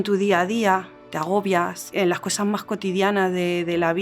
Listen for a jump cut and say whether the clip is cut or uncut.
cut